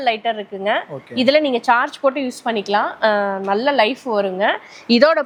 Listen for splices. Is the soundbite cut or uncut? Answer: uncut